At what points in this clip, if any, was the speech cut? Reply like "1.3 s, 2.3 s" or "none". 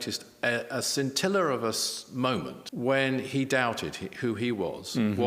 2.6 s